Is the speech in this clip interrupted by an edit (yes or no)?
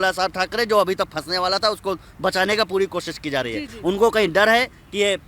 no